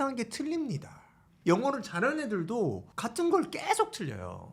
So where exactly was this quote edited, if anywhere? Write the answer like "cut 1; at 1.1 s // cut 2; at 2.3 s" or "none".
cut 1; at 1.3 s // cut 2; at 2.9 s